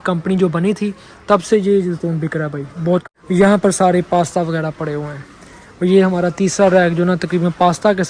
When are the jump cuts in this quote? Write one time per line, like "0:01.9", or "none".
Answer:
0:03.1